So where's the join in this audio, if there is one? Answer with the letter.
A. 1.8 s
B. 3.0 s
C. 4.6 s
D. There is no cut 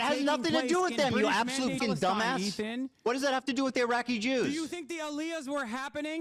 A